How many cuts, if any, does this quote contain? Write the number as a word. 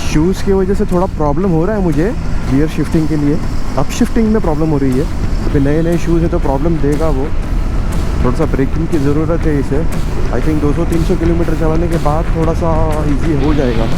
zero